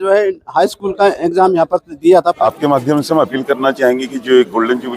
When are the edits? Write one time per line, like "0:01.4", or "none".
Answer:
0:02.4